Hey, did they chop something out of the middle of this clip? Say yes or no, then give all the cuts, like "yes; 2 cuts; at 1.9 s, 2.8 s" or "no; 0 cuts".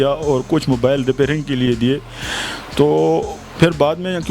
no; 0 cuts